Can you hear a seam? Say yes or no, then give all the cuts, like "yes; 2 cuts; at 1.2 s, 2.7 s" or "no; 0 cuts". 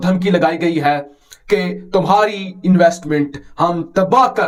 no; 0 cuts